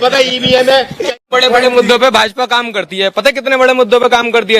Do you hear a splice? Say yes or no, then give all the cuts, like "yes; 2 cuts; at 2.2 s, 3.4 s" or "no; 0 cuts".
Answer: yes; 1 cut; at 1.1 s